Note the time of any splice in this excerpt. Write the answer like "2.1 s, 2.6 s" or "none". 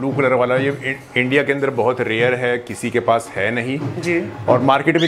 none